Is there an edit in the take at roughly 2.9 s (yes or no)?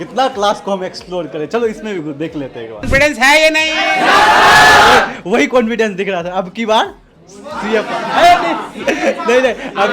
yes